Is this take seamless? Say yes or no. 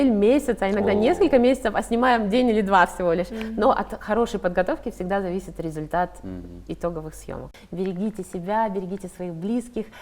no